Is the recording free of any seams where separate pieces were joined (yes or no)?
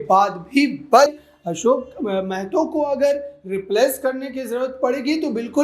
no